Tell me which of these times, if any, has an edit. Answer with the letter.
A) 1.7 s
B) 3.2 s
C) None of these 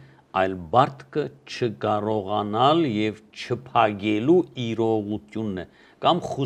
C